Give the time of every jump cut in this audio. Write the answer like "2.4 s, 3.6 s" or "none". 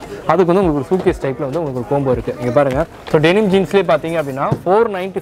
3.1 s